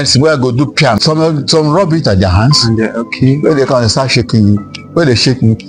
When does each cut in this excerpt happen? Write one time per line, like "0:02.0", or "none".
0:01.0